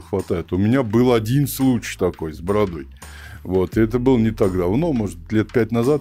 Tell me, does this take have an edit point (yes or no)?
no